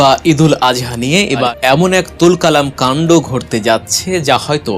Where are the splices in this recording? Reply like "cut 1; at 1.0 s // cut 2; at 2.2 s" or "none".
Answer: cut 1; at 1.5 s